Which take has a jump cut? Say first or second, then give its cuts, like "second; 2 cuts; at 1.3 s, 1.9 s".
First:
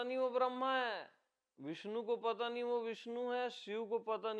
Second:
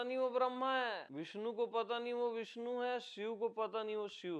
second; 1 cut; at 1.1 s